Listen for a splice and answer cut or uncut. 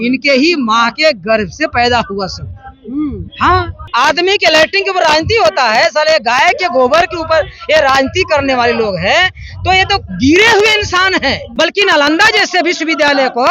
cut